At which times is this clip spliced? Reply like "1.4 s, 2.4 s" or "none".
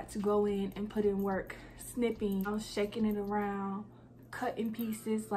2.5 s